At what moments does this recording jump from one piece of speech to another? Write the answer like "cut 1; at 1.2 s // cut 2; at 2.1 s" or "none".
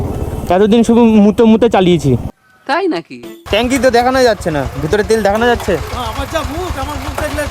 cut 1; at 3.4 s